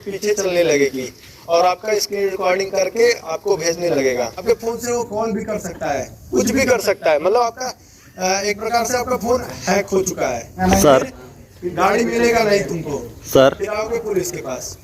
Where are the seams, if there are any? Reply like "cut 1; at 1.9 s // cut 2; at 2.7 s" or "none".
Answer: cut 1; at 4.4 s // cut 2; at 10.6 s